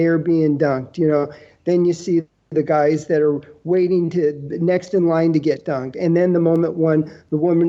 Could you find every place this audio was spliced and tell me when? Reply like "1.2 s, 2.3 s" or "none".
none